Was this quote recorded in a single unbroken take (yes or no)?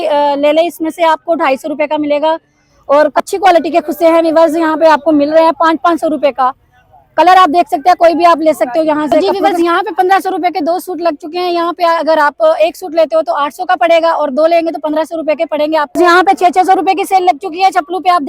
no